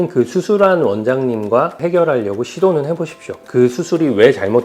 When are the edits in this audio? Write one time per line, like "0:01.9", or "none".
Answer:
0:01.8
0:03.4